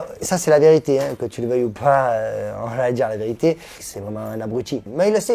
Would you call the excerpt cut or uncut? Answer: cut